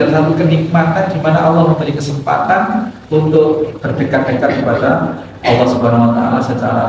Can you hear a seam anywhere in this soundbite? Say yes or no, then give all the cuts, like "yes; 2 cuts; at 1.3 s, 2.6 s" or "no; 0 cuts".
no; 0 cuts